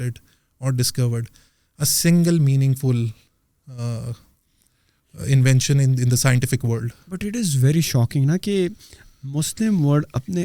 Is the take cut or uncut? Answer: uncut